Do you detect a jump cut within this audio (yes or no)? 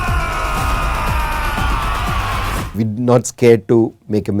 yes